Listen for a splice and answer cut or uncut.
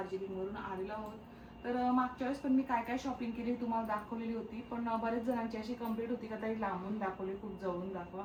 uncut